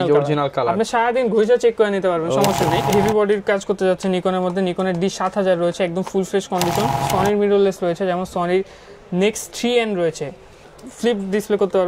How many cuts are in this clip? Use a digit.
3